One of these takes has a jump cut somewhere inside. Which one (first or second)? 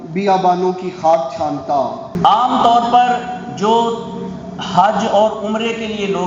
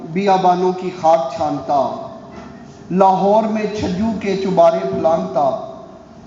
first